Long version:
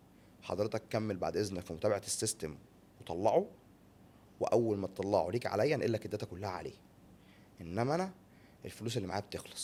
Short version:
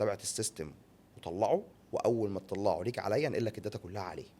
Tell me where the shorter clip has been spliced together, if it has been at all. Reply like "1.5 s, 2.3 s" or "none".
1.8 s